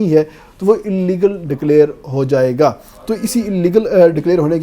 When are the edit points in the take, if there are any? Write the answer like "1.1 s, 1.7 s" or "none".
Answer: none